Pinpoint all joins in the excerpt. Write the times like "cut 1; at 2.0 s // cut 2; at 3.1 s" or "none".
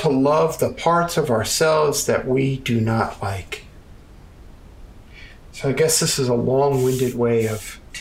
cut 1; at 4.0 s